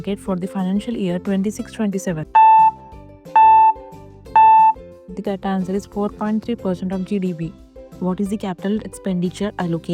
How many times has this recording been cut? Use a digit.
3